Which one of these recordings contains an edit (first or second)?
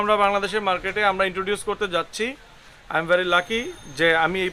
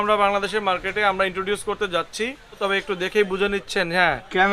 second